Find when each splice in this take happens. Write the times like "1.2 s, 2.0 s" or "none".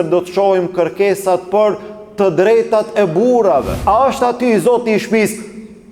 3.7 s